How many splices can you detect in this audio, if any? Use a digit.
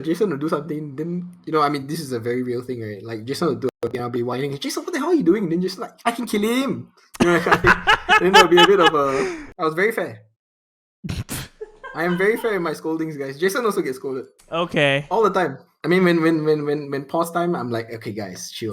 2